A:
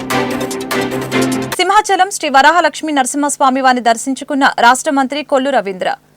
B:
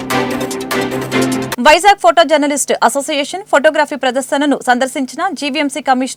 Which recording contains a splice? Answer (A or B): A